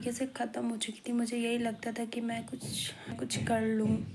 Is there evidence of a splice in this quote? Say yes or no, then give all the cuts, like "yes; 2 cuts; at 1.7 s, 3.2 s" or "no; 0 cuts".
yes; 1 cut; at 3.1 s